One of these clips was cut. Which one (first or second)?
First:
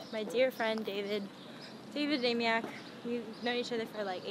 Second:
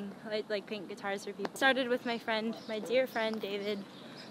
second